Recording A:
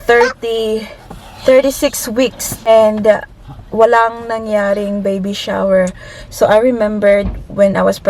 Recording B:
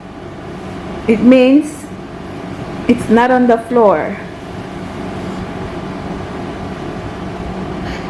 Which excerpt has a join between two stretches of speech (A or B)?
A